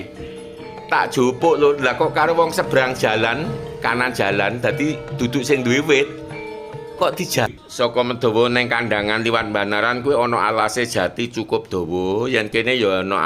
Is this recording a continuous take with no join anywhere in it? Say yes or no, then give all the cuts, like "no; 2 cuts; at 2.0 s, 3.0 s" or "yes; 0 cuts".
no; 1 cut; at 7.5 s